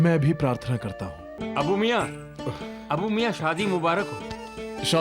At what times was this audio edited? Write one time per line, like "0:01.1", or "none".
0:01.3